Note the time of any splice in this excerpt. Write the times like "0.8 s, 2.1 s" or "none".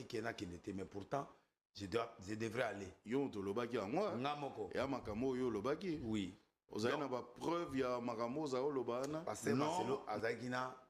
9.8 s